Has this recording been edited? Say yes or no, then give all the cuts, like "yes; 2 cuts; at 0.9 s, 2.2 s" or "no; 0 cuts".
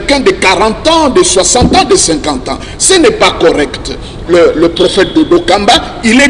yes; 1 cut; at 4.1 s